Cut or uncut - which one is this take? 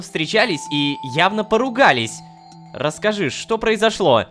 uncut